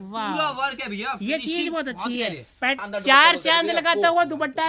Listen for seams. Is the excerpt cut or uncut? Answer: cut